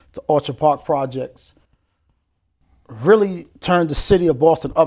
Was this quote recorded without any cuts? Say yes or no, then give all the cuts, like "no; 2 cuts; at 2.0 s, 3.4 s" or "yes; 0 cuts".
yes; 0 cuts